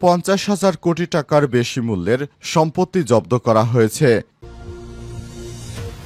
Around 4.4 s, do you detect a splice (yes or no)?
yes